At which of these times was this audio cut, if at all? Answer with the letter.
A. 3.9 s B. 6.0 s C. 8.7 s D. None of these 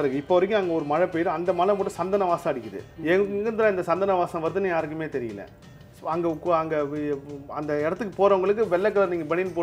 D